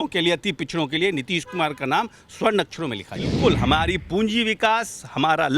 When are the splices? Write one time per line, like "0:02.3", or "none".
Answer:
0:03.3